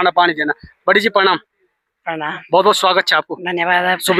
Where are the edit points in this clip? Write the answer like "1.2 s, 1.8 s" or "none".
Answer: none